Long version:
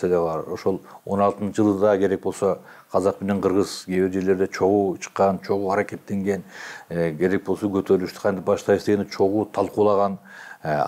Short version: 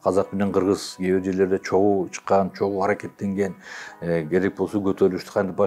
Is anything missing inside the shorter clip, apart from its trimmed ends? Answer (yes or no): no